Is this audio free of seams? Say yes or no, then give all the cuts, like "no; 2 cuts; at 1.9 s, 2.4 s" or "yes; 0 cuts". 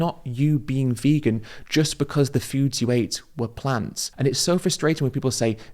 no; 1 cut; at 4.0 s